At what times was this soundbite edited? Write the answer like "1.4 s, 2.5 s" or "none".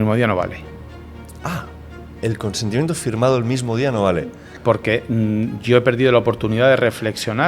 4.5 s